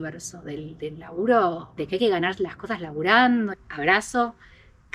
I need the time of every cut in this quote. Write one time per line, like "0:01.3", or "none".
0:03.5